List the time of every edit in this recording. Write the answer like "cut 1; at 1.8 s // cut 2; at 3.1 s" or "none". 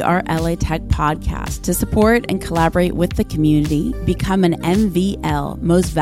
none